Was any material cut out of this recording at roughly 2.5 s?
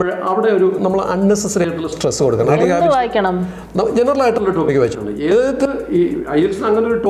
yes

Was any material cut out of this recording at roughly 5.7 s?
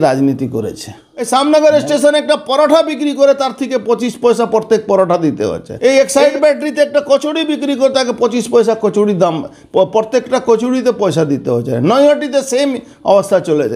yes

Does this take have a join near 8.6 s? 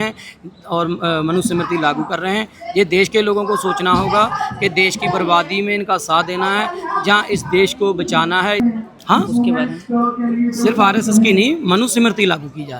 yes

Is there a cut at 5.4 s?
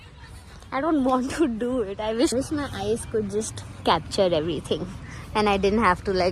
no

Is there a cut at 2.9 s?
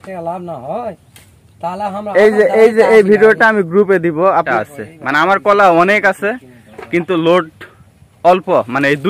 no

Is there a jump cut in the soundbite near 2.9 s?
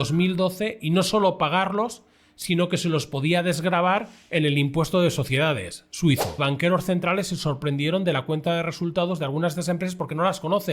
no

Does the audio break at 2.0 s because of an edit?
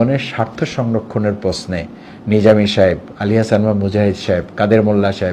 no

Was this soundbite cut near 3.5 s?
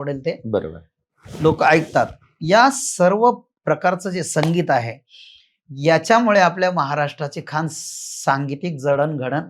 yes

